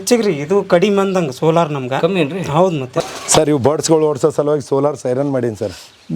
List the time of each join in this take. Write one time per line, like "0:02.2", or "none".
0:03.0

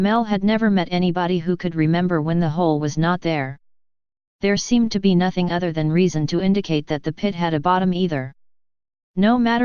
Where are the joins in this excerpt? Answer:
none

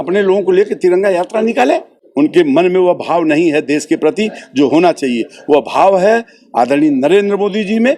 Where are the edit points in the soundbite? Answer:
0:02.0

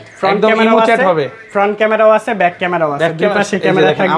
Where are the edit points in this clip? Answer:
none

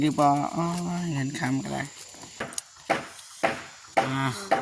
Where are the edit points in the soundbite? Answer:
0:02.4

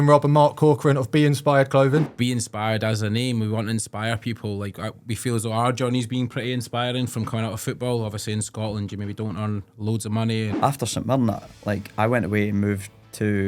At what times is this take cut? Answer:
0:02.1
0:10.5

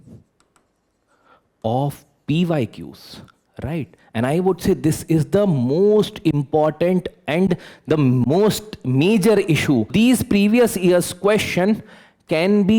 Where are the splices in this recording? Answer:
0:09.9

